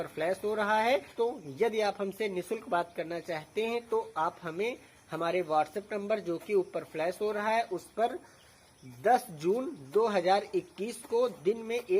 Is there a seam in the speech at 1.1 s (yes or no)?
yes